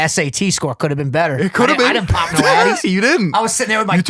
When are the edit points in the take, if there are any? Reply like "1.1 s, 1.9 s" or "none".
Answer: none